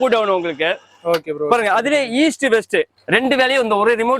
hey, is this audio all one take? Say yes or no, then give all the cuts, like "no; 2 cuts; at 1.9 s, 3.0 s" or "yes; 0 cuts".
no; 1 cut; at 3.0 s